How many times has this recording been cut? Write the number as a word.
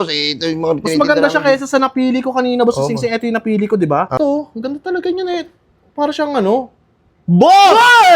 one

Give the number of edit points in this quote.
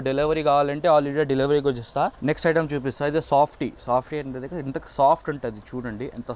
one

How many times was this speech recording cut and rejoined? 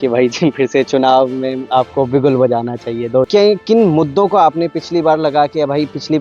one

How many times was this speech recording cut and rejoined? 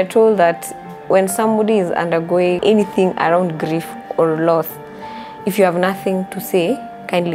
one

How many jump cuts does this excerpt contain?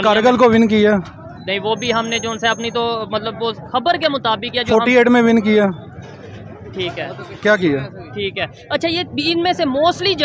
zero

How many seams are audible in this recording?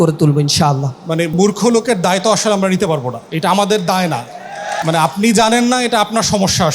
three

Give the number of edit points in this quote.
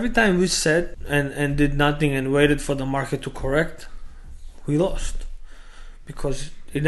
one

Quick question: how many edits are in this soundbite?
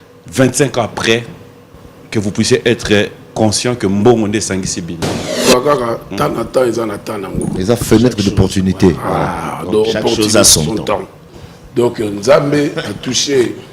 one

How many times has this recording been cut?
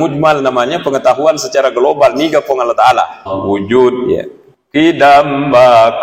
one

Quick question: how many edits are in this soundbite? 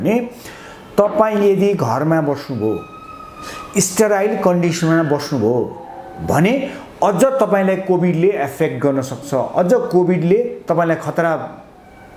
zero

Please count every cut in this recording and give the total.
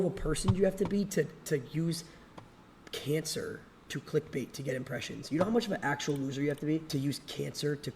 one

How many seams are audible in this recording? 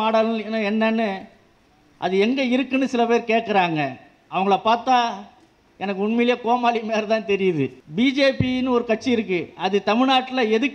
one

